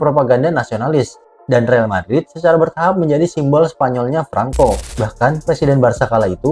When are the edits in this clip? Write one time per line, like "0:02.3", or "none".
0:04.9